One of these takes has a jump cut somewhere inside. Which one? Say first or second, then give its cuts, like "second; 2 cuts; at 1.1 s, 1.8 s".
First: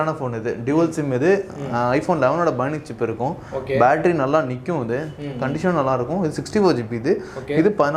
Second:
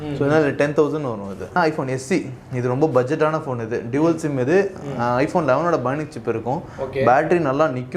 second; 1 cut; at 1.5 s